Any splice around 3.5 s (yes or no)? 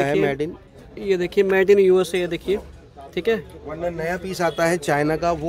no